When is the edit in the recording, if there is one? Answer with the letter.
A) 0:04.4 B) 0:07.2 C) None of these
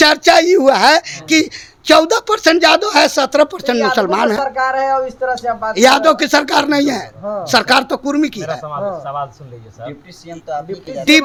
C